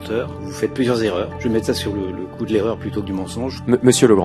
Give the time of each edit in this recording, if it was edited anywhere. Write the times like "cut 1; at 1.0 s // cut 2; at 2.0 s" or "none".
none